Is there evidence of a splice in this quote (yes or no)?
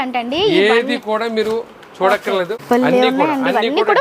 yes